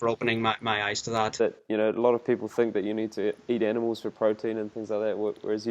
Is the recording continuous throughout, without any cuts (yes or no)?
no